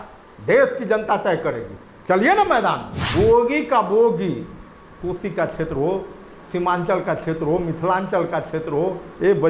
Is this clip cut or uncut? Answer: cut